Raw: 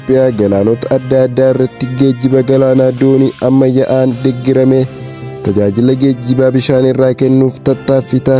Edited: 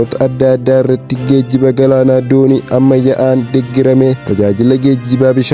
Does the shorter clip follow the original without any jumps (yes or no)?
no